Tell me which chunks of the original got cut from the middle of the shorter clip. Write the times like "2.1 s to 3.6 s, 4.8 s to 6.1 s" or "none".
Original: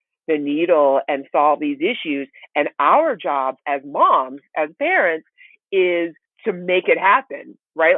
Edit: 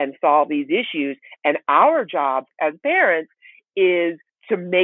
3.6 s to 4.4 s